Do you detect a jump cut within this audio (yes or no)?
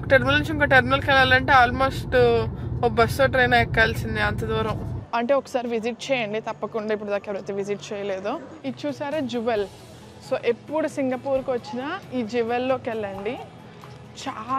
yes